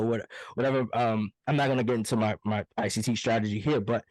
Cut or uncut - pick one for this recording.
uncut